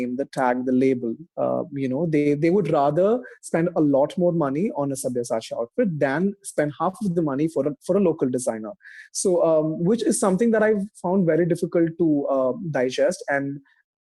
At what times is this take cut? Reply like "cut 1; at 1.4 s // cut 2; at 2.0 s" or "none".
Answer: none